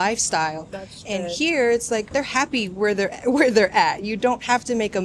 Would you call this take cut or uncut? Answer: cut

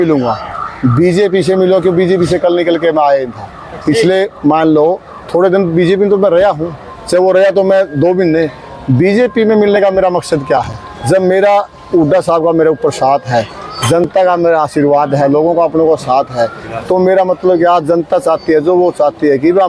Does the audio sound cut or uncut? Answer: uncut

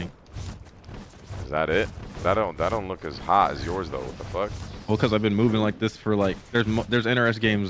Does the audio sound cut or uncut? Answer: uncut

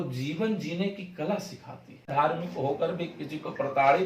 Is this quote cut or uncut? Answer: cut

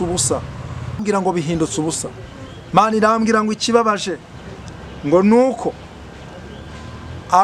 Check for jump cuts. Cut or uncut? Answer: cut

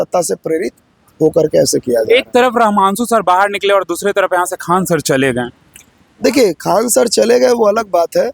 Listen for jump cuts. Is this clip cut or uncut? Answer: uncut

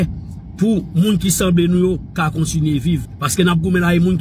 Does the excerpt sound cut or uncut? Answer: cut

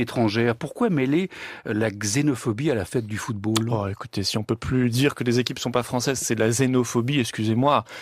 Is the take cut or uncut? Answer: cut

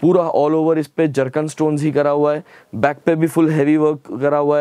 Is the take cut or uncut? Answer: uncut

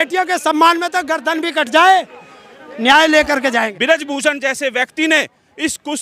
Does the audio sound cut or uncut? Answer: cut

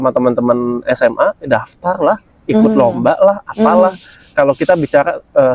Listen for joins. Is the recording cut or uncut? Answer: uncut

